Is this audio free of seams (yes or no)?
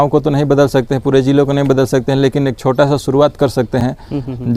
yes